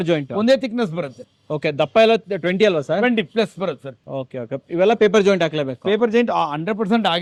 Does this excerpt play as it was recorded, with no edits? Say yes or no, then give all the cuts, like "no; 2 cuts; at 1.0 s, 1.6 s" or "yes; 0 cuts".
yes; 0 cuts